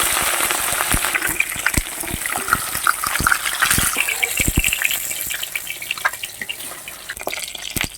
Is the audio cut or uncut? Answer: cut